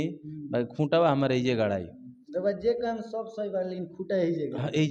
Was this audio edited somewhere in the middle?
no; 0 cuts

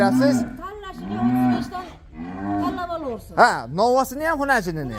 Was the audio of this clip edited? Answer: no; 0 cuts

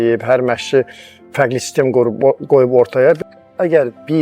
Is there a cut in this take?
yes; 1 cut; at 3.2 s

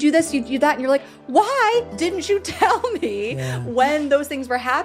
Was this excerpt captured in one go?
yes; 0 cuts

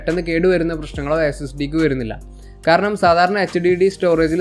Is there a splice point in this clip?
no; 0 cuts

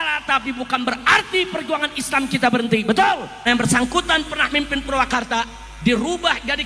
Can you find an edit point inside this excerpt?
yes; 1 cut; at 3.4 s

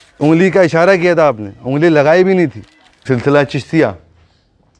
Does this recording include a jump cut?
yes; 1 cut; at 2.9 s

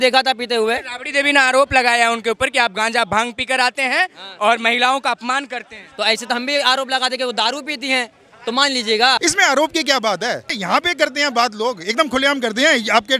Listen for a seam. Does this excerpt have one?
yes; 2 cuts; at 9.2 s, 10.6 s

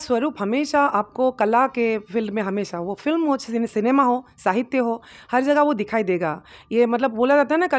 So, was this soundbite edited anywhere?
no; 0 cuts

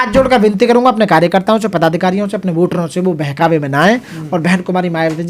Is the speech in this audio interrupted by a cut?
no; 0 cuts

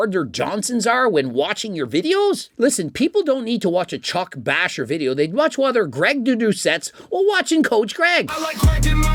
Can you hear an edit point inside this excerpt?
no; 0 cuts

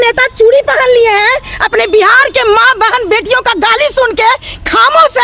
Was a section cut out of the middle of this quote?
no; 0 cuts

